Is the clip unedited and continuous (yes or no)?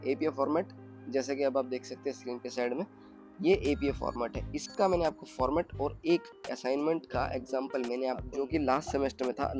no